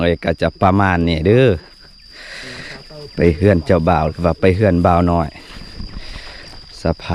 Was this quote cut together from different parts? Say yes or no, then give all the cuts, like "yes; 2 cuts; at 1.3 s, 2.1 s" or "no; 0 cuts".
no; 0 cuts